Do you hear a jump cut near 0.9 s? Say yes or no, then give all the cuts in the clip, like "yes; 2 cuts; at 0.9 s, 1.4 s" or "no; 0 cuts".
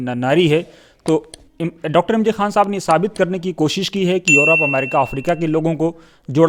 no; 0 cuts